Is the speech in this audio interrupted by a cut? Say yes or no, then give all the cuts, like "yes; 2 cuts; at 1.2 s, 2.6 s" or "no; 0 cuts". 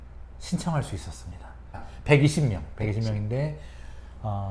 yes; 1 cut; at 1.8 s